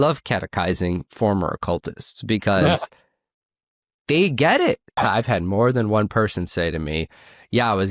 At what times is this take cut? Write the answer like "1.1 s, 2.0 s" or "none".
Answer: 5.0 s